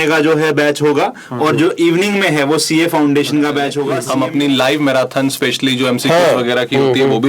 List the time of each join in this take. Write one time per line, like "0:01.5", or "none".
0:04.0